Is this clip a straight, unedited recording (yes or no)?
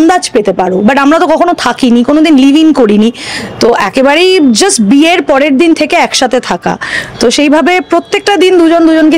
yes